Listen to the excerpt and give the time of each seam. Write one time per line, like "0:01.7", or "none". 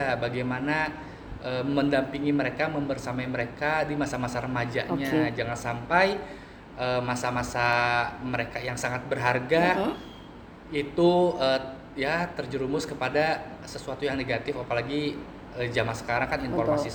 none